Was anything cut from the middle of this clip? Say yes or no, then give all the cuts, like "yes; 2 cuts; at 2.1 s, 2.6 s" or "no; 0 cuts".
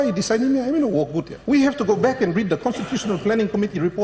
yes; 1 cut; at 1.3 s